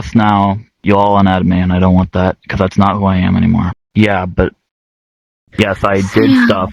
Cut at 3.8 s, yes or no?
yes